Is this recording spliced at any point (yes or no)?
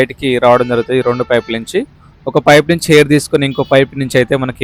no